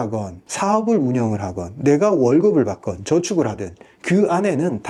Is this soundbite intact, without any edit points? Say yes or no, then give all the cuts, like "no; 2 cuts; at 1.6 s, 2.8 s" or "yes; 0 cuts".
yes; 0 cuts